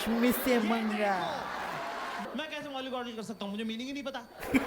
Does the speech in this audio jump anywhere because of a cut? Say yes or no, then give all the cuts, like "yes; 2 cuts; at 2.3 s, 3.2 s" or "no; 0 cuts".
yes; 1 cut; at 2.2 s